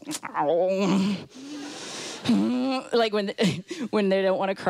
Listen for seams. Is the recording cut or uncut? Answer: uncut